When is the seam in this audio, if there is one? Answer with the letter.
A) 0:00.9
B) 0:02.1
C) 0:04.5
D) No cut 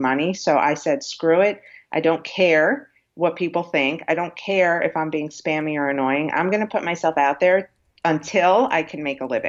D